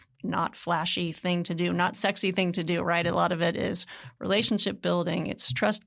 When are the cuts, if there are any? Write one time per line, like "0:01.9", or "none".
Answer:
none